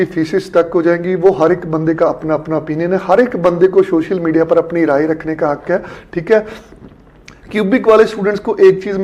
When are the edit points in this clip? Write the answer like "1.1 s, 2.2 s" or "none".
none